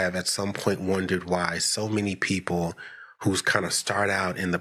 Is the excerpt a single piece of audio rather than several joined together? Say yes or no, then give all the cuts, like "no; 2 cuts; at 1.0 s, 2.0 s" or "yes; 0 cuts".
yes; 0 cuts